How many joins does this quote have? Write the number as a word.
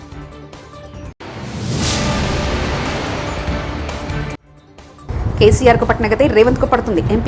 zero